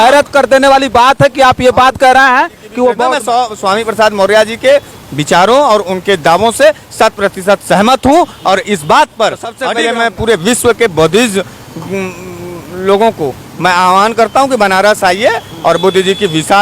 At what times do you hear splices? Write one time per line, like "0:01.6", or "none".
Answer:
0:03.2
0:09.7

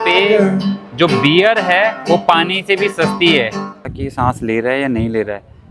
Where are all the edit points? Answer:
0:03.9

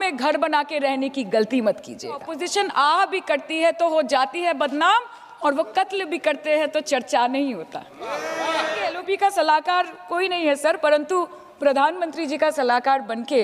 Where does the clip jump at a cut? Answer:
0:02.3
0:08.9

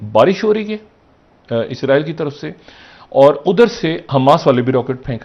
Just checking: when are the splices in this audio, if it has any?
none

